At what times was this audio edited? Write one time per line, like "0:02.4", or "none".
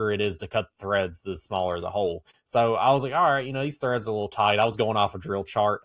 0:02.3